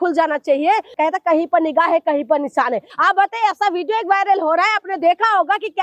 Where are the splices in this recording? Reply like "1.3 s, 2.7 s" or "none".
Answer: 0.9 s, 2.9 s